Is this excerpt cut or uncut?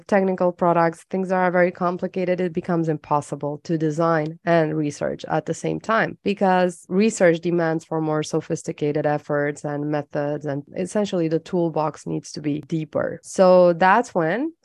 uncut